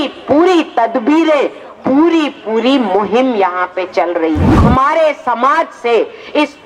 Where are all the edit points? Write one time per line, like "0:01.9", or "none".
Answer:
0:04.6